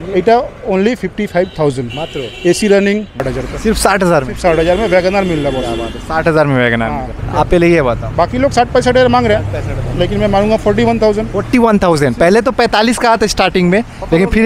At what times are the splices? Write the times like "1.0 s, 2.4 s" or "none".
3.3 s, 7.2 s